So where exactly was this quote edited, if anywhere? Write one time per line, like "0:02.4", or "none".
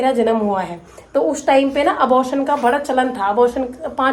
none